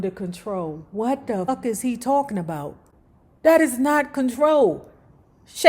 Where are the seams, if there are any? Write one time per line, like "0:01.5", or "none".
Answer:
0:01.5